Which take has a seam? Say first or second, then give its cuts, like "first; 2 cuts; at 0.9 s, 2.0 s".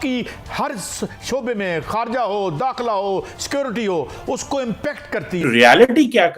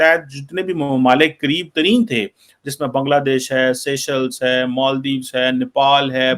first; 1 cut; at 5.4 s